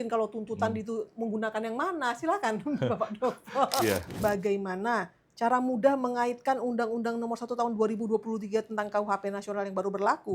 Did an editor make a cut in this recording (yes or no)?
yes